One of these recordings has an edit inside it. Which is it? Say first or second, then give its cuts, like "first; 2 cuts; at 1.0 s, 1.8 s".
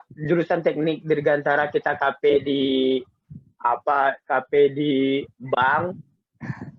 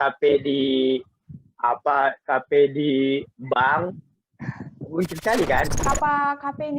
second; 1 cut; at 5.7 s